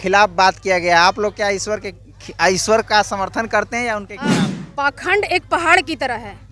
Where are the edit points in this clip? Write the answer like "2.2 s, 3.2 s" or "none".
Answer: 4.6 s